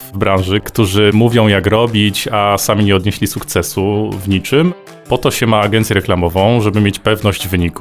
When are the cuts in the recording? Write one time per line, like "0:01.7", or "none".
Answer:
0:01.1
0:04.8

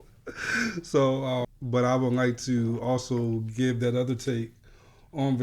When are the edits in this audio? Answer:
0:01.5

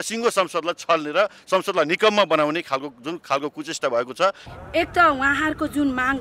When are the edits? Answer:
0:04.5

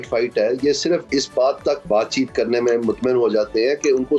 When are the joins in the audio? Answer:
0:01.1
0:01.8

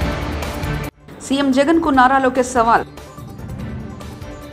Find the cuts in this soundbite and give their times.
0:01.0

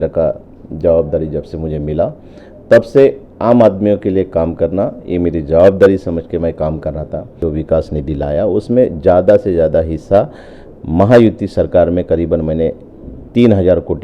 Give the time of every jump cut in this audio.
0:07.4

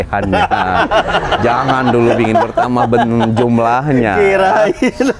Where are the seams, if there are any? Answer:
none

